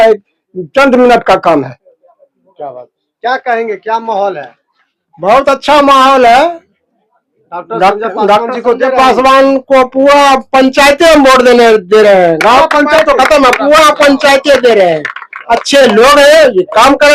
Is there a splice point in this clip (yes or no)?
no